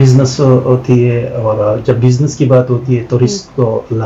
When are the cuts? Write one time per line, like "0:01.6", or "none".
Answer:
none